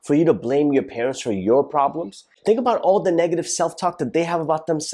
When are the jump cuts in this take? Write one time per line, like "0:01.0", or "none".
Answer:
0:02.3

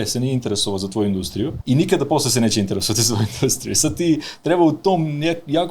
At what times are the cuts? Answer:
0:01.6

